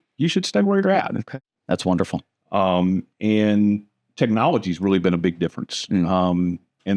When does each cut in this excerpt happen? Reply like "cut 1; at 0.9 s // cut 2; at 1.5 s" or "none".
cut 1; at 1.5 s